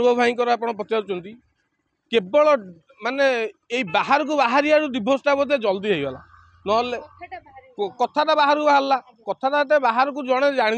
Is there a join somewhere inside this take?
no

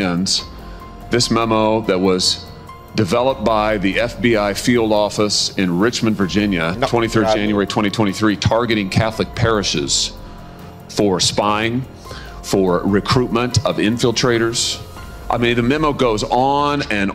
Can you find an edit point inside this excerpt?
no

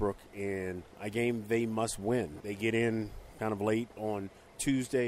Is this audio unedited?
no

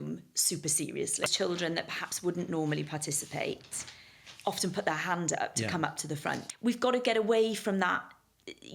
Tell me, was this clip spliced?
yes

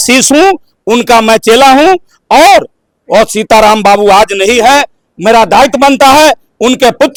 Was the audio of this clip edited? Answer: no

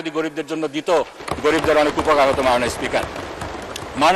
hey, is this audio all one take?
yes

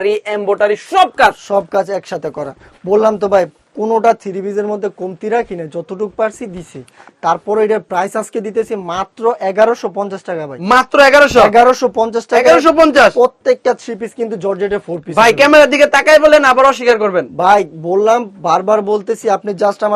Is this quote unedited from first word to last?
yes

